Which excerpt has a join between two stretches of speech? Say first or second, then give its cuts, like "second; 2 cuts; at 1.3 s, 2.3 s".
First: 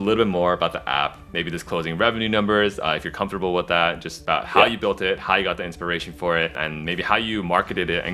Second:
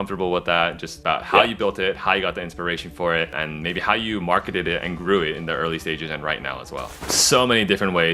second; 1 cut; at 7.0 s